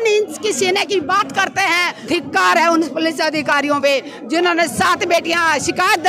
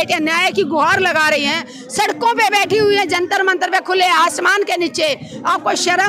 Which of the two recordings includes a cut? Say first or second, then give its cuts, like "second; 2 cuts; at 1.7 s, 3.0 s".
first; 1 cut; at 2.0 s